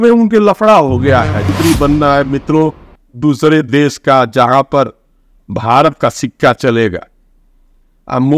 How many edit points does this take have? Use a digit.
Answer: 1